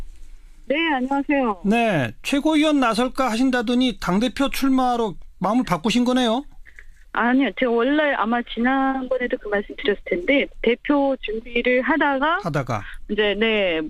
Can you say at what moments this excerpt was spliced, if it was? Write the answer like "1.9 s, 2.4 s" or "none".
none